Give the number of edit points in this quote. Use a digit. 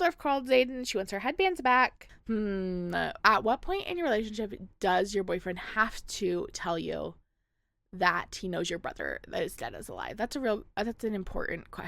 1